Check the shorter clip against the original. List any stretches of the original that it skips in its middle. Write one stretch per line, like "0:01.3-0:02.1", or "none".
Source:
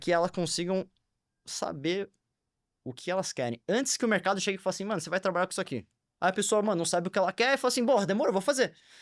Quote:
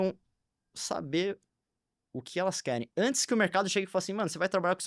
none